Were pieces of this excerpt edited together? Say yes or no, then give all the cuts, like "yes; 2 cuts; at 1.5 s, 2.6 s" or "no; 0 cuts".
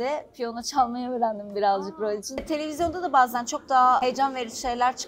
yes; 2 cuts; at 2.4 s, 4.0 s